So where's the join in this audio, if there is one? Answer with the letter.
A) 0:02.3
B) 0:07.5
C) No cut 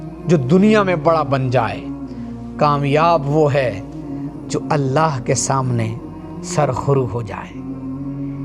B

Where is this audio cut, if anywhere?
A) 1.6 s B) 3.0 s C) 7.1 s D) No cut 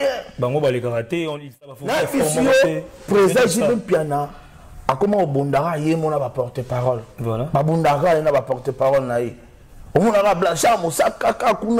A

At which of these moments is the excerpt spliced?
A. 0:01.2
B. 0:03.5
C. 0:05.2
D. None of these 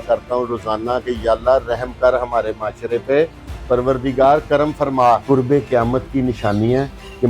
C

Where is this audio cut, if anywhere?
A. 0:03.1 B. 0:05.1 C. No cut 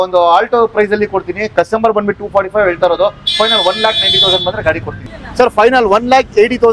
B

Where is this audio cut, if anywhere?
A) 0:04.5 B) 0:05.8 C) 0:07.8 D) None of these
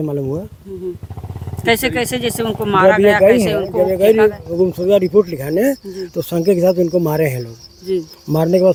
D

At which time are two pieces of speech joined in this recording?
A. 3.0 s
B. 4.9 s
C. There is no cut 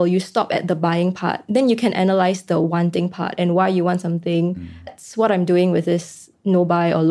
B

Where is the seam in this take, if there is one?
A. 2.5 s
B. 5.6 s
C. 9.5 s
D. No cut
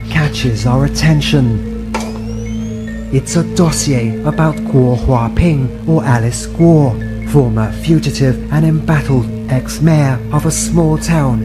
D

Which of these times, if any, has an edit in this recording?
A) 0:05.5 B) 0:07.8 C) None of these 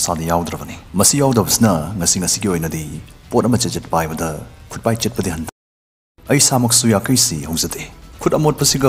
A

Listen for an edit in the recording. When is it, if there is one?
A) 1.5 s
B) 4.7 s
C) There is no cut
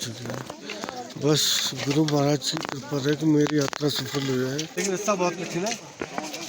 B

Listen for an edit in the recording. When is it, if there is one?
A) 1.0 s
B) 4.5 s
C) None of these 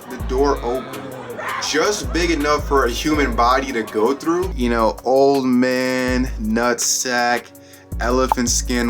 B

